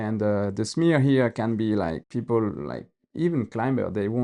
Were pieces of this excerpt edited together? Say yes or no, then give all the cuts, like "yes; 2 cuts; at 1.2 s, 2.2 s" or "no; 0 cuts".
yes; 1 cut; at 2.0 s